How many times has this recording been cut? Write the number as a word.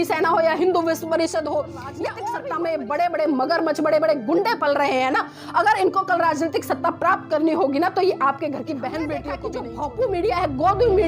two